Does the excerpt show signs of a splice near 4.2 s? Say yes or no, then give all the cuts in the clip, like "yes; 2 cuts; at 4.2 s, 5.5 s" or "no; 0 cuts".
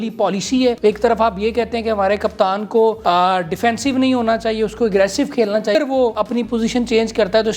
no; 3 cuts; at 0.8 s, 3.0 s, 6.0 s